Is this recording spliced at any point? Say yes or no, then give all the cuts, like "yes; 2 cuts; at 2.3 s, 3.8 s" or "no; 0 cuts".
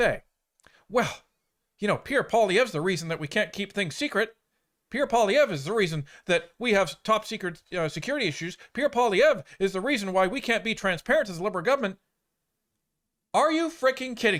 no; 0 cuts